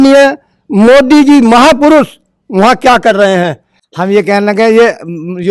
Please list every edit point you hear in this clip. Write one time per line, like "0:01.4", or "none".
0:03.5